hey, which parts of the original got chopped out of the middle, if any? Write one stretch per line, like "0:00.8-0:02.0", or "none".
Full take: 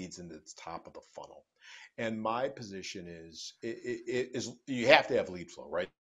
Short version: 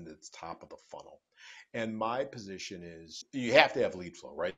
0:03.5-0:04.6